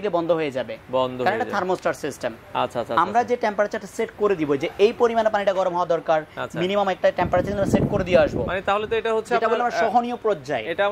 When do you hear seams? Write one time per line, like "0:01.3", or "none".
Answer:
none

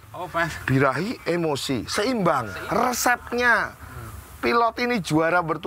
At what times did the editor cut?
0:02.5

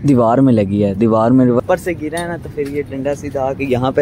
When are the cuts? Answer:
0:01.6

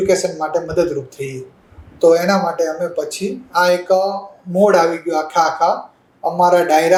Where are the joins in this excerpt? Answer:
none

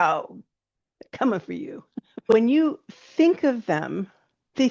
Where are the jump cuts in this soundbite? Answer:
0:02.3

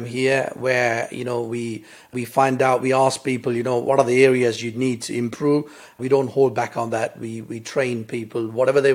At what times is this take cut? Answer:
0:02.1
0:03.8
0:06.0

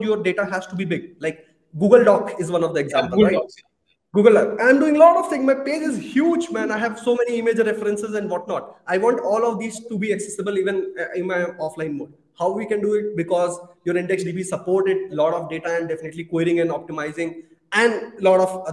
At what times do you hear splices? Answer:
none

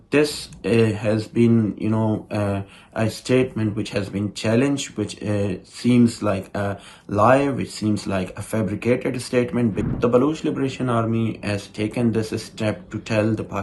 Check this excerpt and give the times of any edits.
0:09.9

